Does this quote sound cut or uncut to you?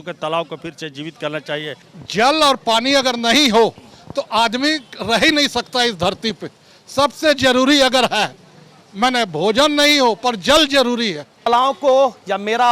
cut